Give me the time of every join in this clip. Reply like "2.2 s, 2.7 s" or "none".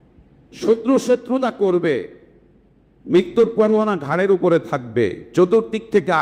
none